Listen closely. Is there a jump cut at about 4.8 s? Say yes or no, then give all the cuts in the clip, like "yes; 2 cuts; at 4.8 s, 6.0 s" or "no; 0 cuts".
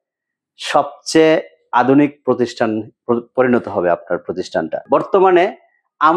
yes; 1 cut; at 4.8 s